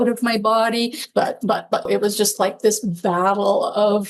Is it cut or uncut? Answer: cut